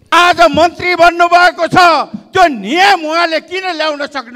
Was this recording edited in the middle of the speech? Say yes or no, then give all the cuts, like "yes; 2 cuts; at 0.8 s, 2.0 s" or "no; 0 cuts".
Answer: no; 0 cuts